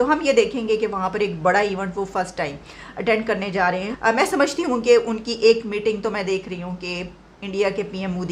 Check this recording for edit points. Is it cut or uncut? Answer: cut